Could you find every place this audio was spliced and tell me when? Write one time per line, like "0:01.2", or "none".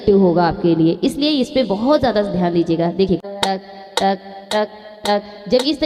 0:03.2